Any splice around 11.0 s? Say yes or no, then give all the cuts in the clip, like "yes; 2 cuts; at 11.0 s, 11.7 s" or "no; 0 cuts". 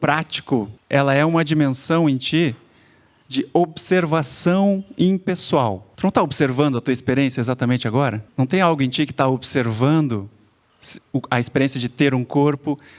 no; 2 cuts; at 5.9 s, 8.2 s